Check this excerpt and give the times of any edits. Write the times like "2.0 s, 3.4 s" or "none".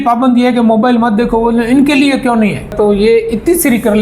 2.7 s